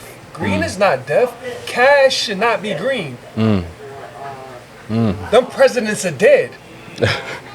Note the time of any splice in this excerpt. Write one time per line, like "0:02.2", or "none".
none